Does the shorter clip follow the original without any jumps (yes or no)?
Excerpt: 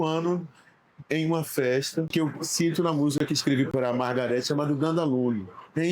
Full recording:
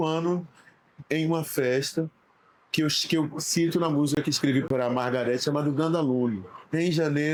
no